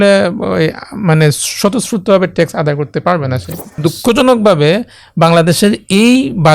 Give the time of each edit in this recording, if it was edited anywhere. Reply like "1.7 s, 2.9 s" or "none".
3.7 s